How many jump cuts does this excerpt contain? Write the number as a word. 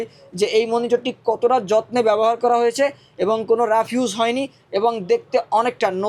zero